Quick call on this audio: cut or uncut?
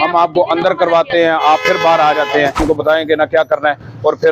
cut